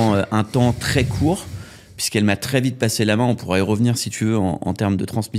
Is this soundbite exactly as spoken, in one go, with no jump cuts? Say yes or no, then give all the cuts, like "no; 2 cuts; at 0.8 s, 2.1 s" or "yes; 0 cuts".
yes; 0 cuts